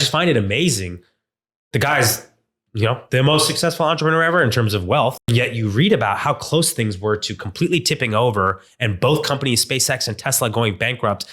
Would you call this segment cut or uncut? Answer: cut